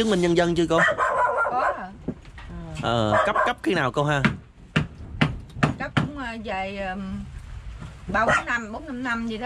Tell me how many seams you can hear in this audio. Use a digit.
0